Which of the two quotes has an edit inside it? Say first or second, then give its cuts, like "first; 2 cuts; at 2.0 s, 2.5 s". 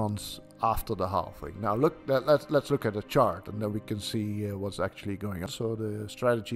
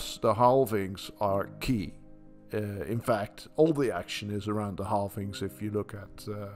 first; 1 cut; at 5.5 s